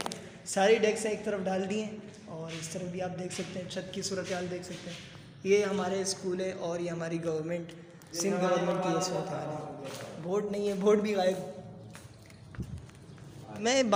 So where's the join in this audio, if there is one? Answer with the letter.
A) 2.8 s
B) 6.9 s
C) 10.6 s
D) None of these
D